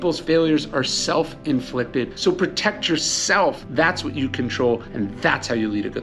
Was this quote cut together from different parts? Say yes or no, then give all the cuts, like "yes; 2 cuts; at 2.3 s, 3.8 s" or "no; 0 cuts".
yes; 2 cuts; at 2.1 s, 4.8 s